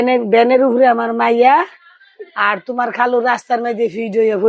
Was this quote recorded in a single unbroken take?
yes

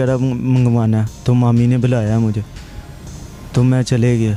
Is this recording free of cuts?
yes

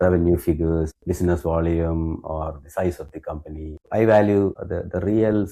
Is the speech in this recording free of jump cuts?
no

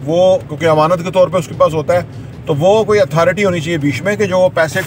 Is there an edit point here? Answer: no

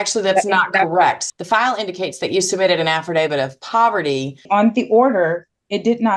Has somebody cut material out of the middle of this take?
yes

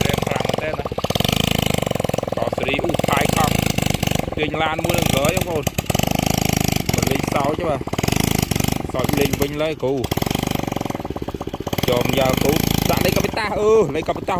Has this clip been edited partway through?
no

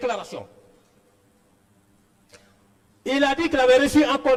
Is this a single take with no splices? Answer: yes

